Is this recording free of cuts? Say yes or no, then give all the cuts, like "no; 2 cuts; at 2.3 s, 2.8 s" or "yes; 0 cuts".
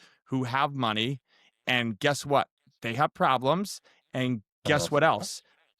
yes; 0 cuts